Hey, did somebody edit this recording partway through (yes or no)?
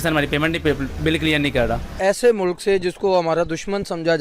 yes